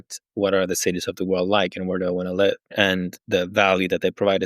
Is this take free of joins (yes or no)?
no